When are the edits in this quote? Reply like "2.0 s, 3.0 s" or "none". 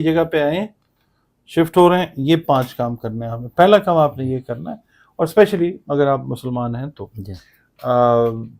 none